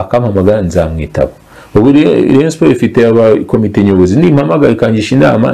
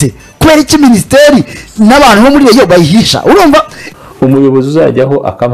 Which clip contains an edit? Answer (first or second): second